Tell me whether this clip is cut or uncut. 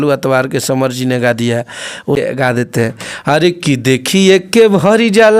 cut